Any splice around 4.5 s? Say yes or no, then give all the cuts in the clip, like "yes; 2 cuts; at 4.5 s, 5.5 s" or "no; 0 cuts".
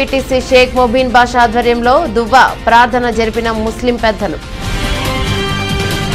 yes; 1 cut; at 4.5 s